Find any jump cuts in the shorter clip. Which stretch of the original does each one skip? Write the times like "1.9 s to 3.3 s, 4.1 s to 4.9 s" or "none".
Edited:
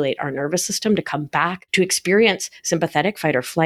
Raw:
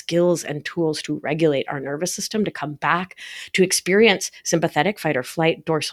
3.1 s to 3.4 s